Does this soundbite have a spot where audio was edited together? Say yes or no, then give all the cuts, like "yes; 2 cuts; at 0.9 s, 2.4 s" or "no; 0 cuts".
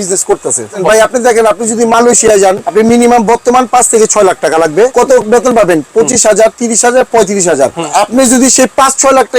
yes; 4 cuts; at 0.8 s, 2.6 s, 4.9 s, 7.9 s